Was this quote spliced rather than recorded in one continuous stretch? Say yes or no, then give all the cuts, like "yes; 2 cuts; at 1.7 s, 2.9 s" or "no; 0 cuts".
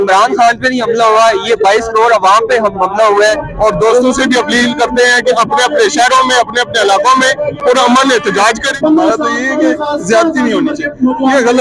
yes; 2 cuts; at 3.5 s, 8.7 s